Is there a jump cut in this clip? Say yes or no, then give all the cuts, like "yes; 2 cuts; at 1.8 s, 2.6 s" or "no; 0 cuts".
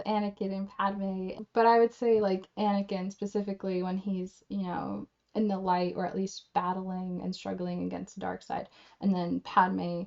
yes; 1 cut; at 1.4 s